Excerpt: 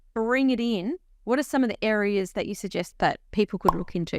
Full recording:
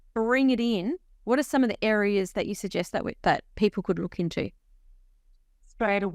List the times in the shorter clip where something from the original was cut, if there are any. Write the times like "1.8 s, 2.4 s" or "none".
2.9 s